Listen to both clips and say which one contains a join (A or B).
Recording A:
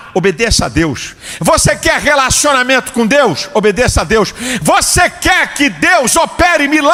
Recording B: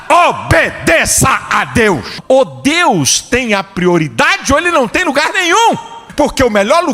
B